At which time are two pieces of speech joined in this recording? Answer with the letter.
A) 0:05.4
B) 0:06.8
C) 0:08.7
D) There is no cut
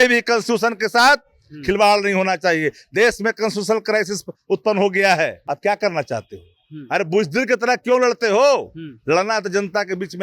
A